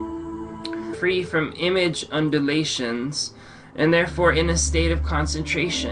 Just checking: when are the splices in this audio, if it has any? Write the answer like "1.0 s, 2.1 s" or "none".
none